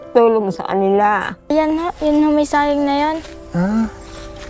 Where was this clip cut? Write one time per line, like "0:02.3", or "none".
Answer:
0:01.5